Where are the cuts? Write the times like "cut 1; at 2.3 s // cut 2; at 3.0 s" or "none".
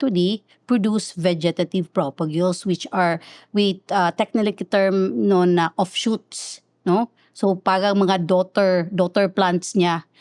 none